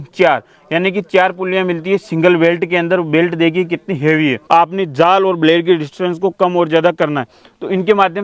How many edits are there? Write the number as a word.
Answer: one